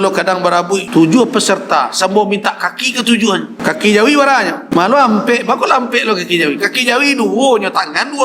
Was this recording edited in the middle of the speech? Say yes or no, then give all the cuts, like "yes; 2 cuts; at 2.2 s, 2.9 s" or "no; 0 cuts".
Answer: yes; 3 cuts; at 0.9 s, 3.5 s, 4.6 s